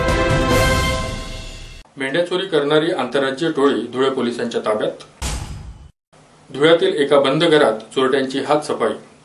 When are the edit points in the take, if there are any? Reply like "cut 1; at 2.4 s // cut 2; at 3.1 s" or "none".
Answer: cut 1; at 1.4 s